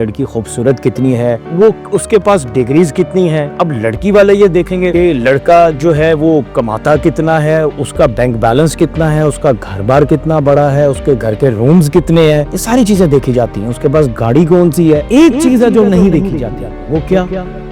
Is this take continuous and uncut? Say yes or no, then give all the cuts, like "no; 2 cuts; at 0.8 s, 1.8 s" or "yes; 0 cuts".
yes; 0 cuts